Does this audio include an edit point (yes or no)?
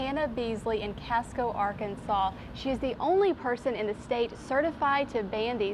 no